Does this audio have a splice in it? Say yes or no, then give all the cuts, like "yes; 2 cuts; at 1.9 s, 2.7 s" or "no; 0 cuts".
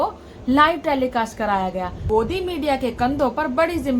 yes; 1 cut; at 2.0 s